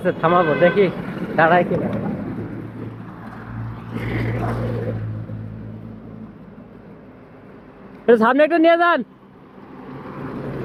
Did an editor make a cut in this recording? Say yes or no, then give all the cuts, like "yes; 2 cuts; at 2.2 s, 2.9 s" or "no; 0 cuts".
no; 0 cuts